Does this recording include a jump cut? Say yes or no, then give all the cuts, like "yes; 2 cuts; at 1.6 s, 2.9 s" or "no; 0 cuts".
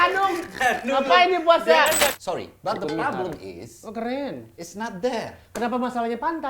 yes; 1 cut; at 2.1 s